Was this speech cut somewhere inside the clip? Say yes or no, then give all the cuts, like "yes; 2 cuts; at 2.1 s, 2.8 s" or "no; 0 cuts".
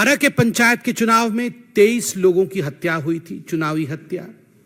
no; 0 cuts